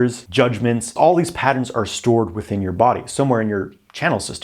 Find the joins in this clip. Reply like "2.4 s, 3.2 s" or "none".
0.9 s